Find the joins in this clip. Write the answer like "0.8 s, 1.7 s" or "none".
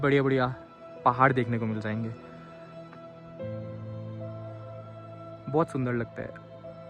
none